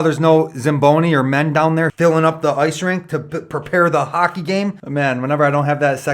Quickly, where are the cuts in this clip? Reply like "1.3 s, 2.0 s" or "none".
1.9 s, 4.8 s